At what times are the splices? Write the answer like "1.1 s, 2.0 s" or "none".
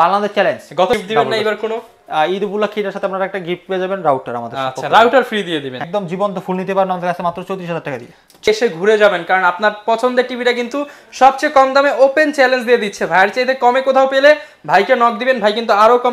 1.0 s, 5.8 s, 8.5 s

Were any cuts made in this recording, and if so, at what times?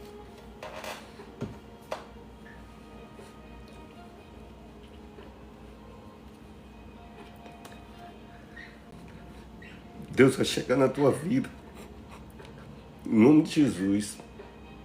8.9 s

